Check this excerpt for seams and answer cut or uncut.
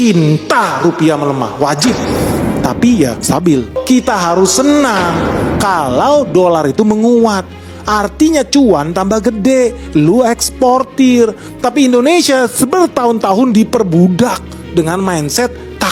uncut